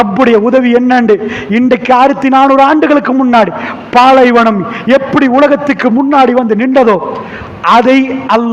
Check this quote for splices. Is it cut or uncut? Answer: cut